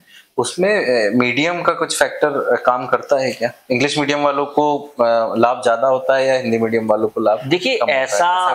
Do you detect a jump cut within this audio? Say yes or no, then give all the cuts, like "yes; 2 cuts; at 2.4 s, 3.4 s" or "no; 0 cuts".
no; 0 cuts